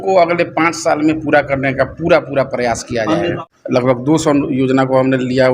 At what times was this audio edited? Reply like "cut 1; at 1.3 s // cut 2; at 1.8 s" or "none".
cut 1; at 3.4 s